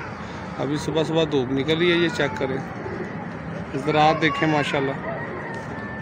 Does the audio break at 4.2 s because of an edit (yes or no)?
no